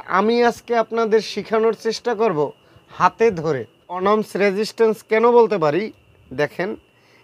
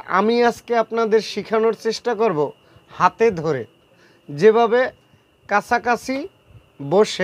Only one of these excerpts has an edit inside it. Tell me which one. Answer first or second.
first